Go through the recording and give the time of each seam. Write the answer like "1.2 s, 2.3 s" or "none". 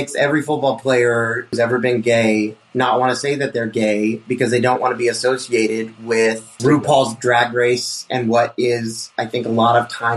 1.6 s, 6.6 s